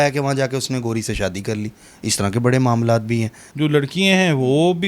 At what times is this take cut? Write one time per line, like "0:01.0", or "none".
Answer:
0:03.4